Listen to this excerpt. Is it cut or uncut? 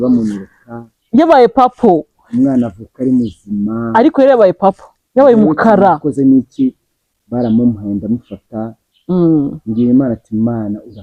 uncut